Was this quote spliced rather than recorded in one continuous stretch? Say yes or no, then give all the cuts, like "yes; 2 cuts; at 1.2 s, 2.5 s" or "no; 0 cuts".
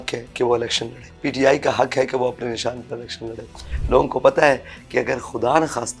yes; 2 cuts; at 1.0 s, 3.7 s